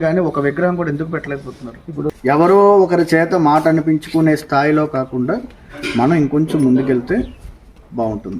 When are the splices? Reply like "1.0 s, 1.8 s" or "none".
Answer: 2.1 s